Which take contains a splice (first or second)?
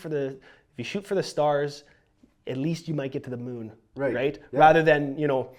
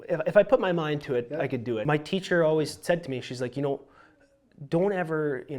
second